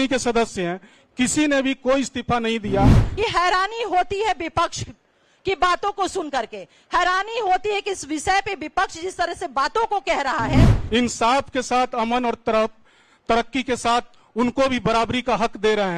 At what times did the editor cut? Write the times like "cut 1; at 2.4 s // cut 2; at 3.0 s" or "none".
cut 1; at 3.0 s // cut 2; at 10.7 s